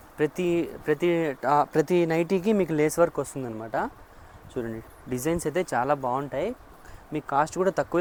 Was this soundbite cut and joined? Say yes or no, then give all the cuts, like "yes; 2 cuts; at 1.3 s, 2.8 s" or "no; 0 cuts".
no; 0 cuts